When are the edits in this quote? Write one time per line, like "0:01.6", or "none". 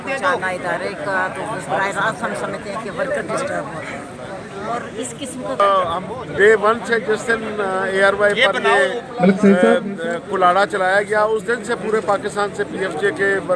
0:05.6

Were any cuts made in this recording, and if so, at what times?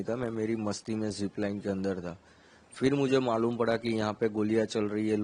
none

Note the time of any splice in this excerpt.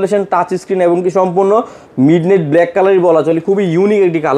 none

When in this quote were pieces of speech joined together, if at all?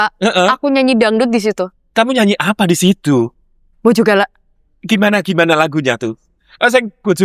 none

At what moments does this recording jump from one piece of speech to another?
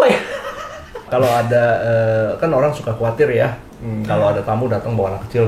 0:01.1

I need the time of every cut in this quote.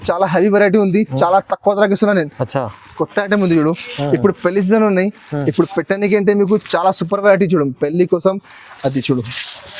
0:02.8

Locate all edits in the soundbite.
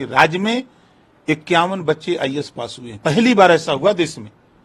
none

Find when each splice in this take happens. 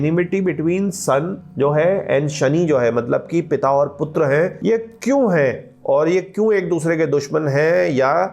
0:01.4
0:04.6

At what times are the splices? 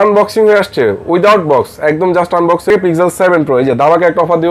0:02.7

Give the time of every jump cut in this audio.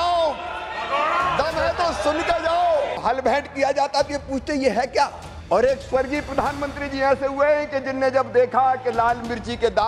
0:03.0
0:05.3

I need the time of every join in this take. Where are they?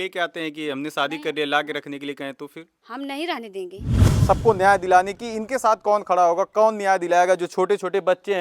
0:04.1

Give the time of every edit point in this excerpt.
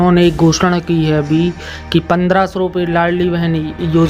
none

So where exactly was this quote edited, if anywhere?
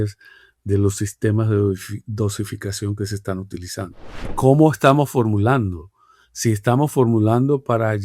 0:04.3

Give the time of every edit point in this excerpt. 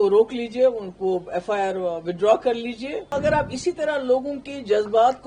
0:03.1

